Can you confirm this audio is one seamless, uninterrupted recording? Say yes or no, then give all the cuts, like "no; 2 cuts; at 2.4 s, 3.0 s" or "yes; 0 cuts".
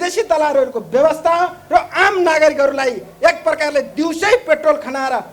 yes; 0 cuts